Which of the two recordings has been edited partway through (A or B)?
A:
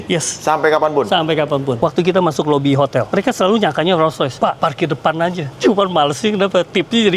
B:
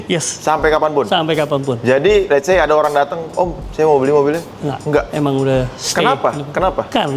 A